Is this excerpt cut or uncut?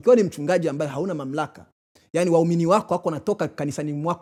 uncut